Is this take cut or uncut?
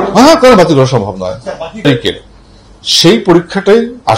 cut